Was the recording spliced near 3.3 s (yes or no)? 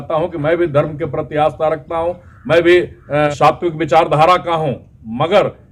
yes